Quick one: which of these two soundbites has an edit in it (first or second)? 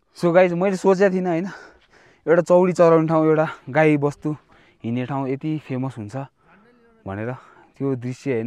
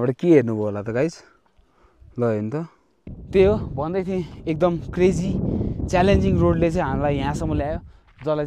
second